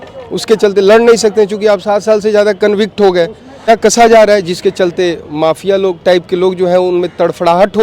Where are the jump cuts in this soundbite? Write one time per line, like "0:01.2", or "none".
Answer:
0:03.7

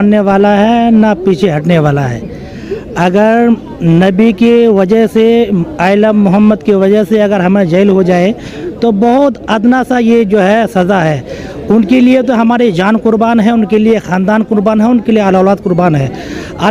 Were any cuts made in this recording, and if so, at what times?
none

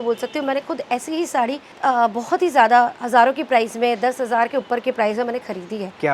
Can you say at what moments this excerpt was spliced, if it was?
none

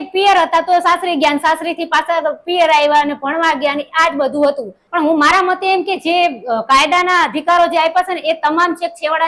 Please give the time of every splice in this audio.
0:04.7

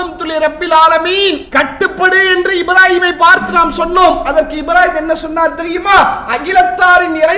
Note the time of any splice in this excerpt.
0:01.4

